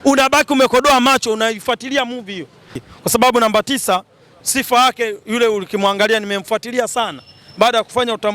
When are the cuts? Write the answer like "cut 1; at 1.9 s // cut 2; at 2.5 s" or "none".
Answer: cut 1; at 2.8 s